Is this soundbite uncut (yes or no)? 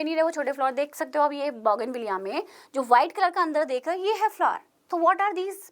no